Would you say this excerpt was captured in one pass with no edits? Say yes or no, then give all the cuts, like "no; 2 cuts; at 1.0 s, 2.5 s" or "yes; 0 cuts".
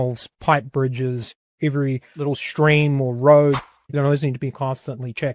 no; 3 cuts; at 1.4 s, 2.1 s, 3.8 s